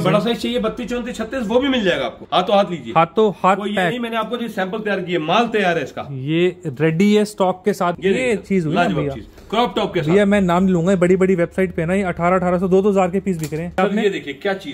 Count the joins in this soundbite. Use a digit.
3